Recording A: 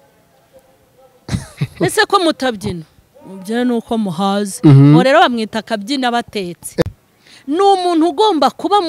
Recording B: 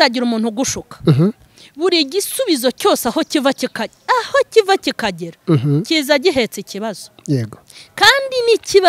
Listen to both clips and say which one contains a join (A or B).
A